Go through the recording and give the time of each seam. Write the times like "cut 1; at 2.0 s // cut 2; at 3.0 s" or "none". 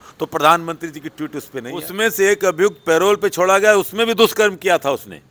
cut 1; at 1.8 s